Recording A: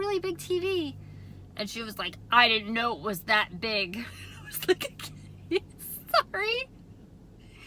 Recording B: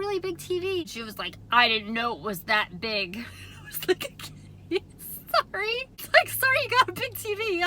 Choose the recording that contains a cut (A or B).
B